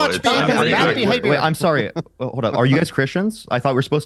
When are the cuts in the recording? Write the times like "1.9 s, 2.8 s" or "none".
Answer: none